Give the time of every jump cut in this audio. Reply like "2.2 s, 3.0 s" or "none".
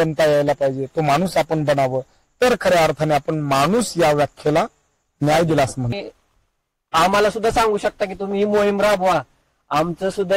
5.9 s